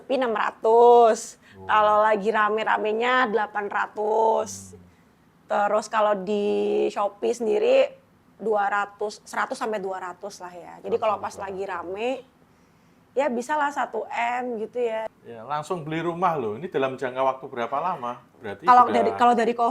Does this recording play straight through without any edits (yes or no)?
no